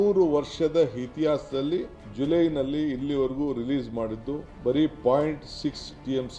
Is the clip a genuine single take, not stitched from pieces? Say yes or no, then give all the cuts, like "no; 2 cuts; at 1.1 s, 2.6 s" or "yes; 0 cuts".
no; 2 cuts; at 2.0 s, 4.5 s